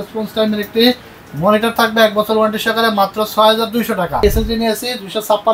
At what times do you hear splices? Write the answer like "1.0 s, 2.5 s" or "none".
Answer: 4.2 s